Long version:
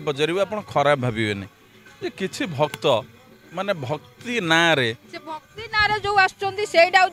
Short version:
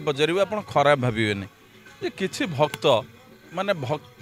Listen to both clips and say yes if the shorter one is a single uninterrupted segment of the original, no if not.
yes